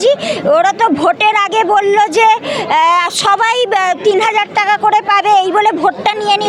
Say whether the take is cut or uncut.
uncut